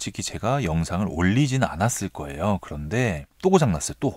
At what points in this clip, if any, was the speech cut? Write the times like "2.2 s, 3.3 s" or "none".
none